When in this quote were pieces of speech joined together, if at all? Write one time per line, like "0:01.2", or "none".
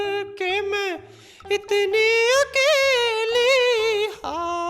none